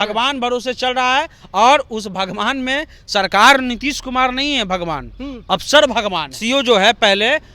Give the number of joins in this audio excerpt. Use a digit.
1